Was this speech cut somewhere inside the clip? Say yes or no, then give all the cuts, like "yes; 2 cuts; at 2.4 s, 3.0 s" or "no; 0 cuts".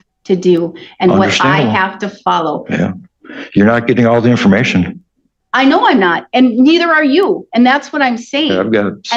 yes; 1 cut; at 4.0 s